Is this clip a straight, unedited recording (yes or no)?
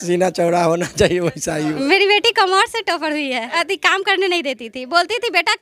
no